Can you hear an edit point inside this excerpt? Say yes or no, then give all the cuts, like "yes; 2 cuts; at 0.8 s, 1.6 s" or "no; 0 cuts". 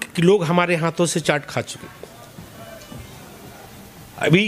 no; 0 cuts